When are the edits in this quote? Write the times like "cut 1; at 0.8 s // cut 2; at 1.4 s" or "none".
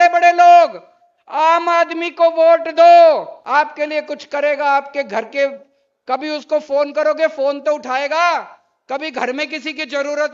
cut 1; at 3.4 s